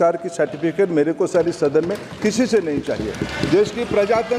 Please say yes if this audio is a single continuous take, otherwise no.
yes